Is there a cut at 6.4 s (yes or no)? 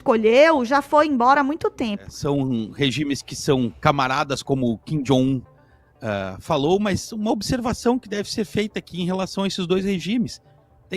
no